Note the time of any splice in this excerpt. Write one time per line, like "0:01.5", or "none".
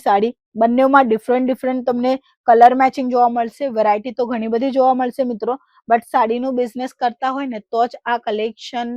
none